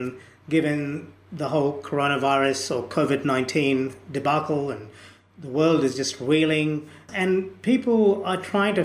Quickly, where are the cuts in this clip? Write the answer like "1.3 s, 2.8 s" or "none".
7.1 s

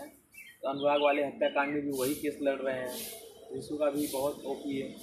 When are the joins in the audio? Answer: none

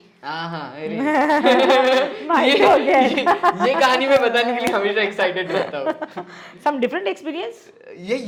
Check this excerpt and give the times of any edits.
none

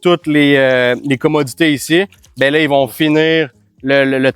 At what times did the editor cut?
none

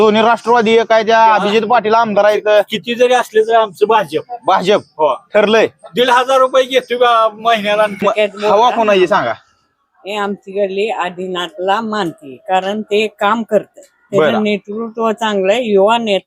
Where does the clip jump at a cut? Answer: 8.0 s

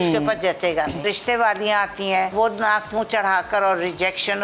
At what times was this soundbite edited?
1.0 s, 2.3 s

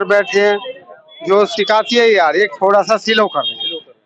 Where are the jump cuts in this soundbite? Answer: none

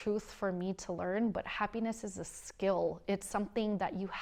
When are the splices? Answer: none

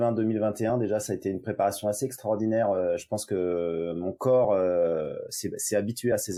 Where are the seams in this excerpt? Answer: none

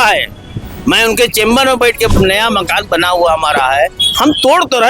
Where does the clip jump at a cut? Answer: 2.1 s

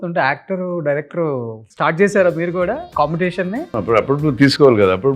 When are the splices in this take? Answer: 1.6 s, 2.9 s, 3.7 s

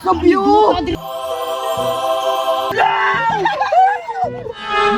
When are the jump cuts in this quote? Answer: 0.9 s, 2.7 s

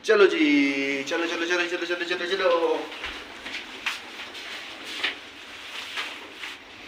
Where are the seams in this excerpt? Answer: none

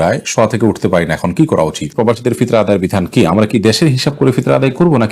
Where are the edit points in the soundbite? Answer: 1.9 s

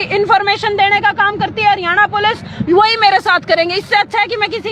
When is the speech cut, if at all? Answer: none

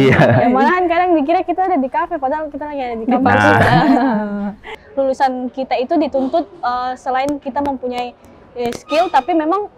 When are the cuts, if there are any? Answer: 4.8 s

